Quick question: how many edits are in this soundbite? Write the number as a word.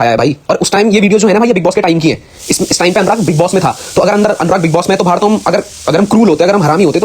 zero